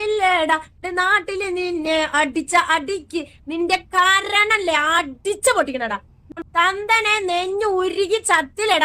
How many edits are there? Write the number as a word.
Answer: one